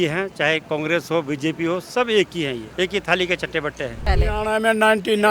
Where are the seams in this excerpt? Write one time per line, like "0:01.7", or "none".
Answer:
0:02.7
0:04.0